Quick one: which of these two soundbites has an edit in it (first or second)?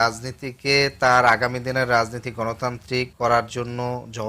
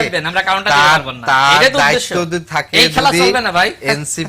first